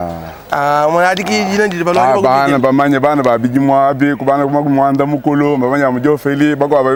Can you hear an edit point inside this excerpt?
no; 0 cuts

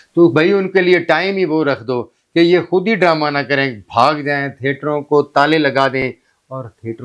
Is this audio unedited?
yes; 0 cuts

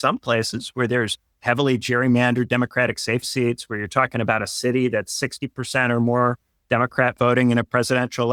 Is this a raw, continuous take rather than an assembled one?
yes; 0 cuts

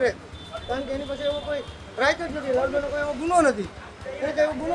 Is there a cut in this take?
no; 0 cuts

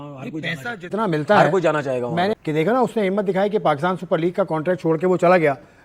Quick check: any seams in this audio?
no; 0 cuts

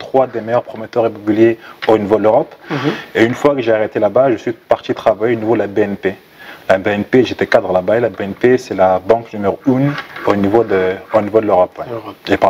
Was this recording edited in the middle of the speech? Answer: no; 0 cuts

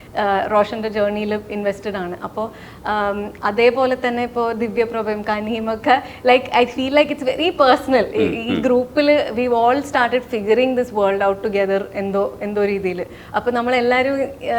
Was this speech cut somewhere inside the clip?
no; 0 cuts

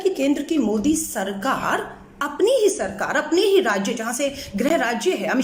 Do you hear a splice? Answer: no; 0 cuts

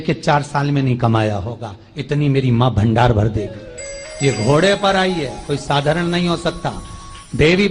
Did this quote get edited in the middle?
no; 0 cuts

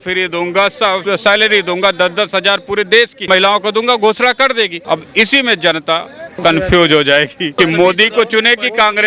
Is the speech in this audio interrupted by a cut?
yes; 5 cuts; at 1.0 s, 3.2 s, 4.8 s, 6.2 s, 7.5 s

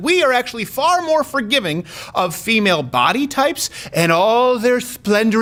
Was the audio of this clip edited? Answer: no; 0 cuts

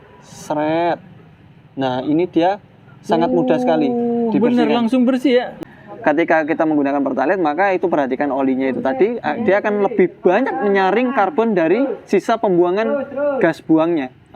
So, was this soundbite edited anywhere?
yes; 1 cut; at 5.6 s

